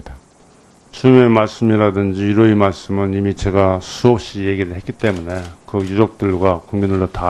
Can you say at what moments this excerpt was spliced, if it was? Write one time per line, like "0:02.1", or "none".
0:03.5